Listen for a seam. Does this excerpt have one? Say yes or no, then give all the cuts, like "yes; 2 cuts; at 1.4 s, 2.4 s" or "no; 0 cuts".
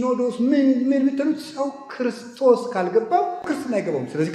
yes; 1 cut; at 3.4 s